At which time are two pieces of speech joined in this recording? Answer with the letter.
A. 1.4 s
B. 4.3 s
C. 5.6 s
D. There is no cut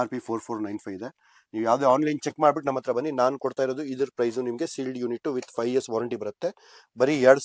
D